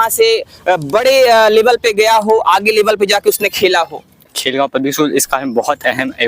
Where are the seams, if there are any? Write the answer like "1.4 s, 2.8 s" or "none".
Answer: 4.3 s